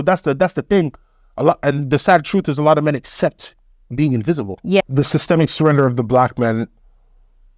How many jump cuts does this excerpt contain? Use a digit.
1